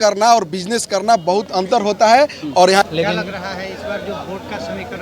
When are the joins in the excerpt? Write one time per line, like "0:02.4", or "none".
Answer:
0:02.9